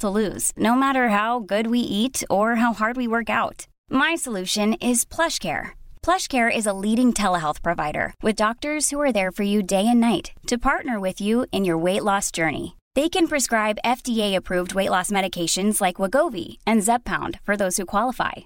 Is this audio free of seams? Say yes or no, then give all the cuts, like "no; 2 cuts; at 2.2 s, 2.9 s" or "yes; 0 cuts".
yes; 0 cuts